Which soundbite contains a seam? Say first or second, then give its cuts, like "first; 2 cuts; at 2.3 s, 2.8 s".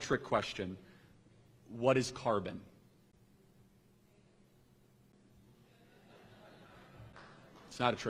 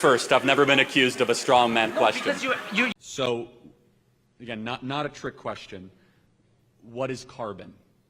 second; 1 cut; at 2.9 s